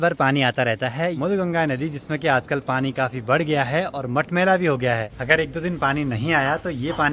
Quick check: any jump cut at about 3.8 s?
no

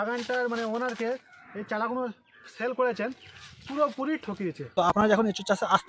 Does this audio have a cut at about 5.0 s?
yes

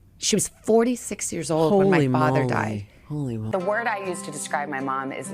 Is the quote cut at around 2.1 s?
no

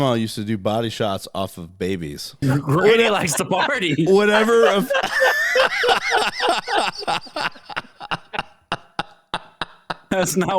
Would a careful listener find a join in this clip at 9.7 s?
no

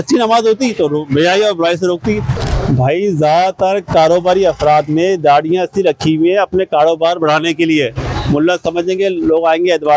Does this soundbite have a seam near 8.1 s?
no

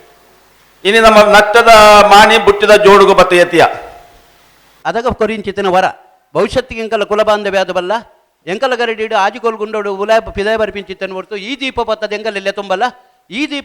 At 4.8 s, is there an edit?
yes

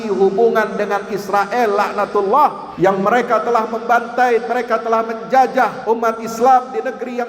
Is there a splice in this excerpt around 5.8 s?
yes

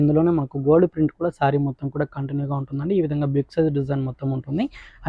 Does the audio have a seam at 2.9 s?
no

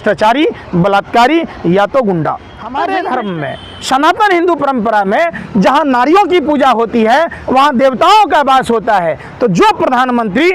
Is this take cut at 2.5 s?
yes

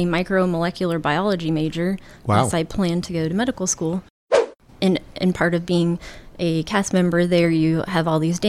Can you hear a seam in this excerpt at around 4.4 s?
yes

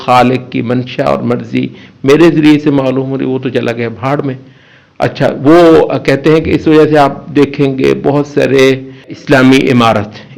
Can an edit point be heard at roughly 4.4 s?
no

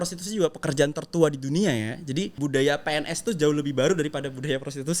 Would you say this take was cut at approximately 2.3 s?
yes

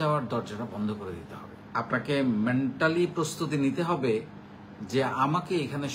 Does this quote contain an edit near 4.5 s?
no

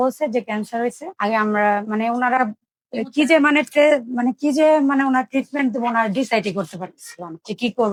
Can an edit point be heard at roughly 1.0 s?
no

